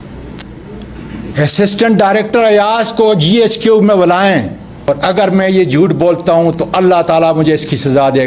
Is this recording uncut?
no; 1 cut; at 4.9 s

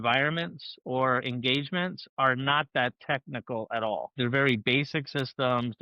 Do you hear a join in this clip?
yes; 1 cut; at 4.1 s

